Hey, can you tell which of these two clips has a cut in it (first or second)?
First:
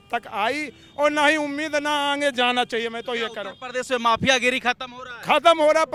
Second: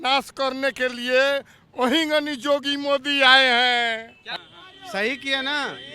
second